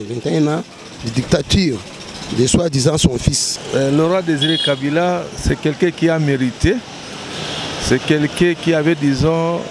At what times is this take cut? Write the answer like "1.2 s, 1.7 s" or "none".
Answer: 3.5 s